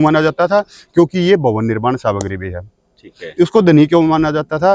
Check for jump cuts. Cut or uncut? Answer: uncut